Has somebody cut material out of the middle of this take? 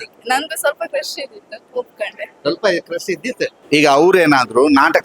yes; 1 cut; at 3.6 s

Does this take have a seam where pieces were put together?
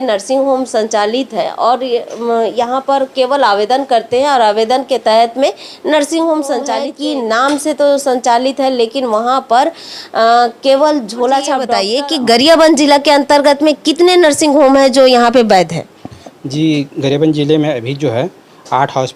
yes; 2 cuts; at 6.8 s, 11.8 s

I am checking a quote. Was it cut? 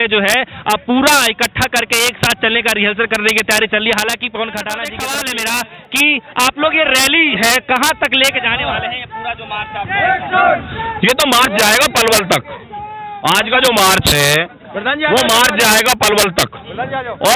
yes; 1 cut; at 4.9 s

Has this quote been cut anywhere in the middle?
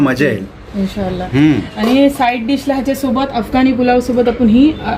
no; 0 cuts

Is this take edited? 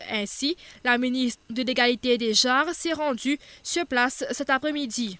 yes; 1 cut; at 3.8 s

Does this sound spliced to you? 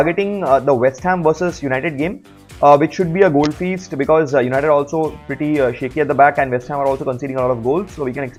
no; 0 cuts

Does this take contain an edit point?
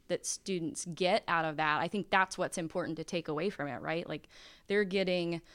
no; 0 cuts

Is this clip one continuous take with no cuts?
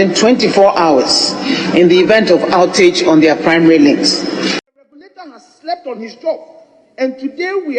no; 1 cut; at 4.6 s

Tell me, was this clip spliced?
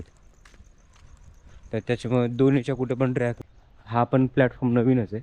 yes; 1 cut; at 3.4 s

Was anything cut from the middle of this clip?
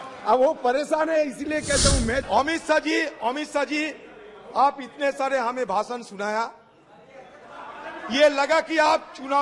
yes; 1 cut; at 2.3 s

